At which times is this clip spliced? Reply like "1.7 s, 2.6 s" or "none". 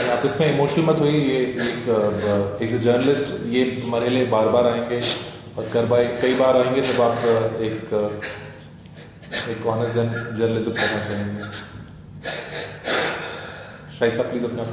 none